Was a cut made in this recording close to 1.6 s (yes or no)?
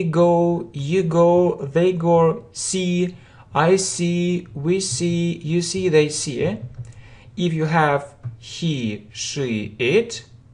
no